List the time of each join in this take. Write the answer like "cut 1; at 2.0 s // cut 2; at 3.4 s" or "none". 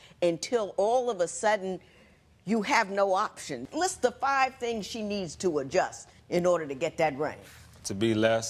cut 1; at 3.6 s